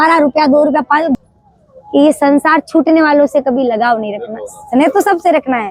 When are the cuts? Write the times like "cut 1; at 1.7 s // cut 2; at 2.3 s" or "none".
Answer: cut 1; at 1.2 s